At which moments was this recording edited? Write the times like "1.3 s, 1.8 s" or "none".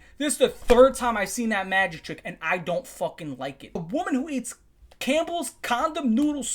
3.8 s